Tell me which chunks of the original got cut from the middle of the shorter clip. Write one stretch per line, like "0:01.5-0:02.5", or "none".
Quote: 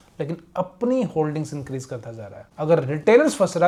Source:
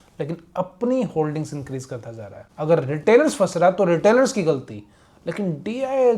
none